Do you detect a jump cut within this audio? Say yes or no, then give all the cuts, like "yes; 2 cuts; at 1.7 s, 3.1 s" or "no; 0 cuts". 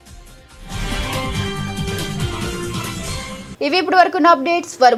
no; 0 cuts